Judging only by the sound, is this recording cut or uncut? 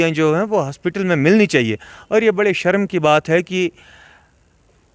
uncut